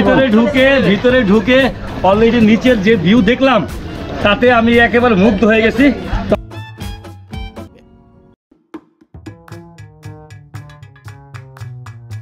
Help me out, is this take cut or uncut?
uncut